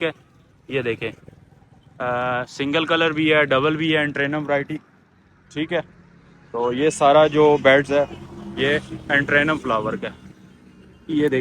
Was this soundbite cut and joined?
no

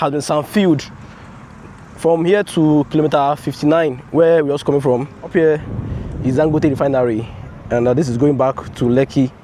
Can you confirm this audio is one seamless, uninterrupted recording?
no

